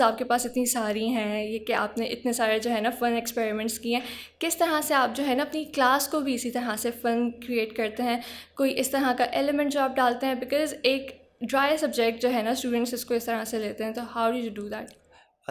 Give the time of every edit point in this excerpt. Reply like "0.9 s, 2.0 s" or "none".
none